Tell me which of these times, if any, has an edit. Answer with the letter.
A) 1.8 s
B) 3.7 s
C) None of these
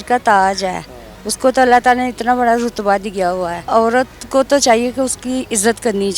B